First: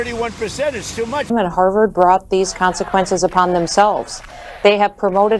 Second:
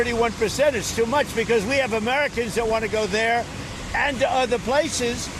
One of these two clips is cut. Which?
first; 1 cut; at 1.3 s

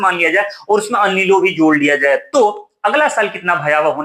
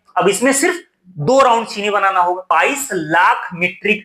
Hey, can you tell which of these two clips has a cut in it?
second; 1 cut; at 2.4 s

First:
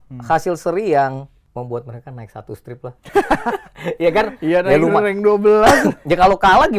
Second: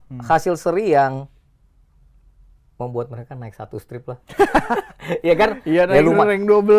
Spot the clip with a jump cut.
first; 1 cut; at 1.4 s

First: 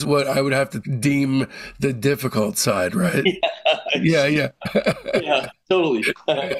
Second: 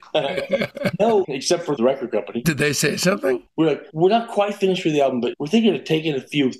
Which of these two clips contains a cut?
second; 3 cuts; at 1.8 s, 3.5 s, 5.3 s

